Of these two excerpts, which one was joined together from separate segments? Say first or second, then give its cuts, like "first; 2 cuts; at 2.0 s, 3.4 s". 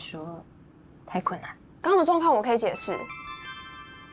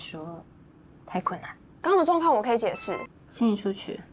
second; 1 cut; at 3.2 s